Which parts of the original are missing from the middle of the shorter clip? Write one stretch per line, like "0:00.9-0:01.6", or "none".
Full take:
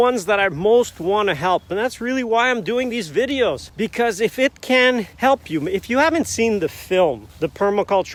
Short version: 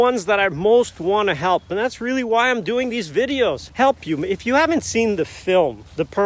0:03.7-0:05.1